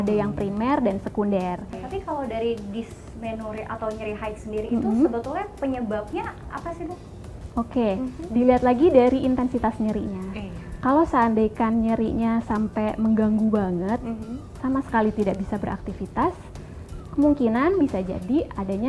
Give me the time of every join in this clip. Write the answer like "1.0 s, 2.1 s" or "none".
1.7 s, 7.4 s